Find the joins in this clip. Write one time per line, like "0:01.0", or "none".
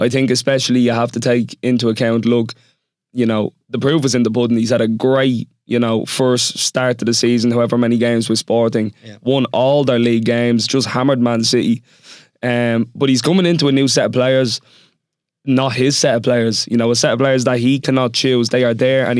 none